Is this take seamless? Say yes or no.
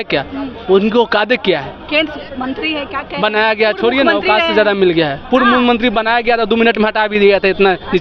yes